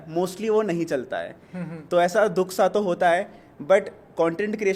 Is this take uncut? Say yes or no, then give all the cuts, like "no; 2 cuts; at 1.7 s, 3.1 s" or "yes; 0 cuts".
yes; 0 cuts